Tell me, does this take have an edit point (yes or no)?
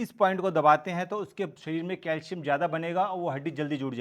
no